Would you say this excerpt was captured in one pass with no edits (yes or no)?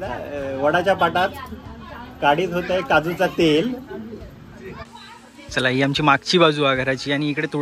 no